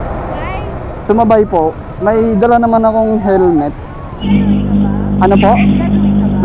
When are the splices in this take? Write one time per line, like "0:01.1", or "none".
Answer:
0:04.2